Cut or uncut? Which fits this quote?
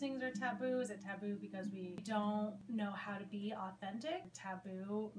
cut